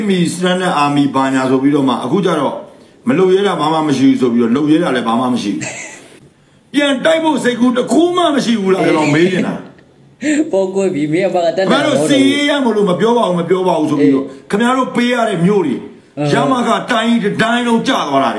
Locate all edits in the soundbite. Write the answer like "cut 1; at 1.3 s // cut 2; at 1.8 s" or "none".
cut 1; at 6.1 s